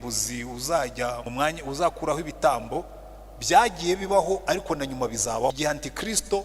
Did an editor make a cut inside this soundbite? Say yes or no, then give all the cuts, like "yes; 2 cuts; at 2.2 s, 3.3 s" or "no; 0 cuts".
yes; 2 cuts; at 1.2 s, 5.6 s